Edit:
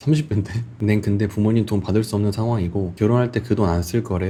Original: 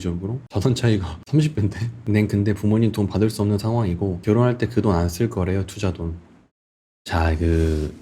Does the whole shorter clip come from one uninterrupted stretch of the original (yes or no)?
yes